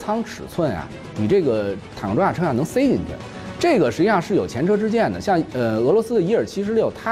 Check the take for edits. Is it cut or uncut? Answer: uncut